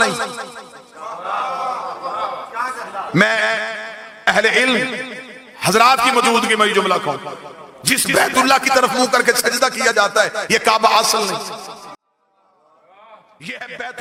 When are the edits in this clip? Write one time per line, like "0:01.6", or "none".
none